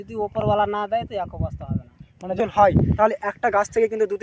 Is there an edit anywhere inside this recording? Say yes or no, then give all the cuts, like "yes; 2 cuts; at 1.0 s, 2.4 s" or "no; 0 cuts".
yes; 1 cut; at 2.4 s